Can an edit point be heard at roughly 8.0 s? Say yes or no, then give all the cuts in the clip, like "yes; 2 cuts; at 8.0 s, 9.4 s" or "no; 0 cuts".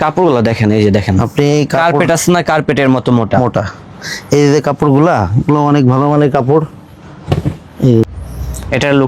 yes; 1 cut; at 8.0 s